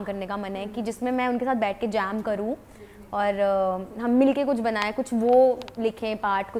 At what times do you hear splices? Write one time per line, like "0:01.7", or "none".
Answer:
none